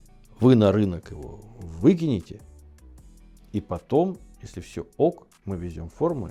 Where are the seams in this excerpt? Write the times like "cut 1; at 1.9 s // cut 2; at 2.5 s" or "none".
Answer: none